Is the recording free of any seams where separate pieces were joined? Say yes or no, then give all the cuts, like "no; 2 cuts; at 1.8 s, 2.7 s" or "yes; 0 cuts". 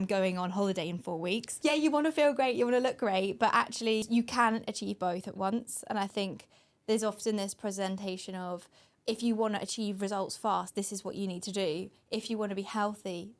no; 2 cuts; at 1.5 s, 4.1 s